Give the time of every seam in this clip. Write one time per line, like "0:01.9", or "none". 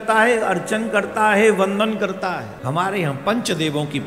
0:02.5